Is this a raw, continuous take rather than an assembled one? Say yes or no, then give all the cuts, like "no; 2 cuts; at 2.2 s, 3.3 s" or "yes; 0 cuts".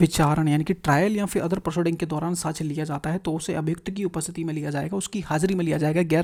yes; 0 cuts